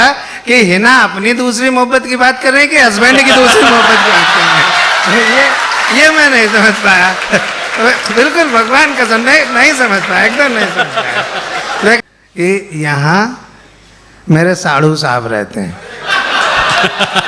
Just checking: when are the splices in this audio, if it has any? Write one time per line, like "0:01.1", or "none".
0:12.0